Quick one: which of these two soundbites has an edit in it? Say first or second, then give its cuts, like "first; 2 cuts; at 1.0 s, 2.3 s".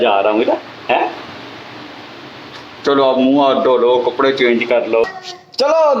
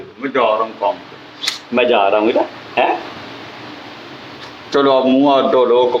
first; 1 cut; at 5.0 s